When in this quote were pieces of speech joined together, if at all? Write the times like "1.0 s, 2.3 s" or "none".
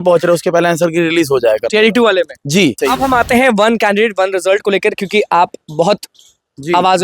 2.8 s